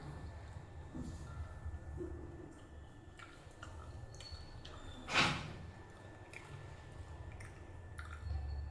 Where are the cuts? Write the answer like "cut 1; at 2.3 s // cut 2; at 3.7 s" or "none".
none